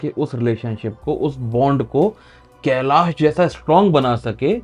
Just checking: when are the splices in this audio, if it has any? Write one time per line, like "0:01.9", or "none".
none